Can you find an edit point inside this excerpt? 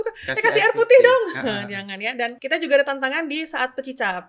yes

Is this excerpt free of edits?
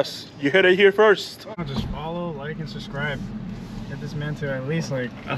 no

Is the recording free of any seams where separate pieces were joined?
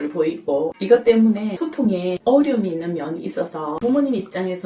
yes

